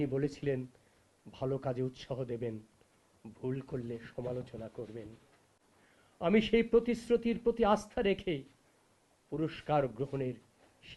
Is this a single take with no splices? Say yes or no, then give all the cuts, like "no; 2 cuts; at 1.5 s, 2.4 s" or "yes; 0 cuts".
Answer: yes; 0 cuts